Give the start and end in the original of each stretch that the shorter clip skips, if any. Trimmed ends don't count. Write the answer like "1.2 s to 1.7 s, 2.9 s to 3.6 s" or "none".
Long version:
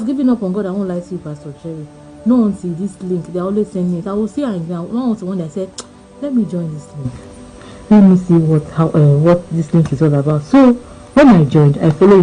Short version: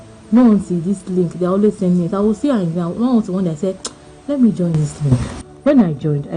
7.4 s to 10.9 s